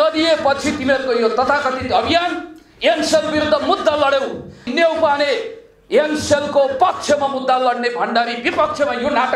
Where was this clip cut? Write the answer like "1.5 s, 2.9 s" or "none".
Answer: 4.6 s